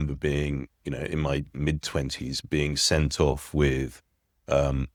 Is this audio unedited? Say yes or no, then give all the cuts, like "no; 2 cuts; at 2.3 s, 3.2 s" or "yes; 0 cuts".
yes; 0 cuts